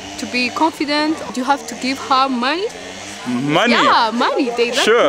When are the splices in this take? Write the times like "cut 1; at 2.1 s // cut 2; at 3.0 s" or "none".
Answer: cut 1; at 1.3 s